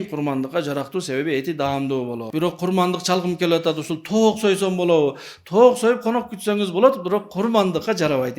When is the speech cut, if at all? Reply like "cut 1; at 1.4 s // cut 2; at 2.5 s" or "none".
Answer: cut 1; at 2.2 s